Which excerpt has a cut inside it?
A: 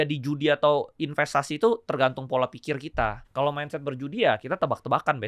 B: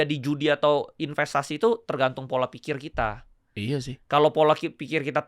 A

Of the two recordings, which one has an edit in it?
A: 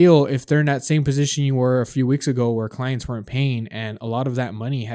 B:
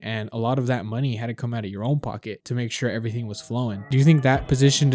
B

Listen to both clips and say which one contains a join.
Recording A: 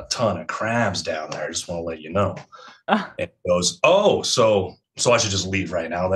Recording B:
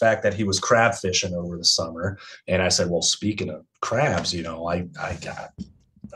A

